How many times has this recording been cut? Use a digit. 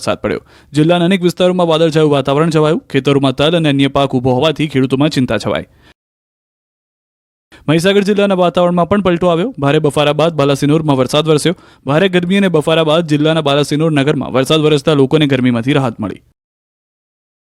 1